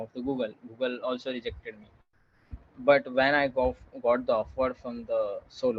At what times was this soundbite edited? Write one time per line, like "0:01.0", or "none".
0:02.5